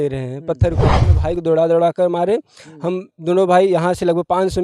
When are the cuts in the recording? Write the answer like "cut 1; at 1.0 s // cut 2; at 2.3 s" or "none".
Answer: cut 1; at 1.1 s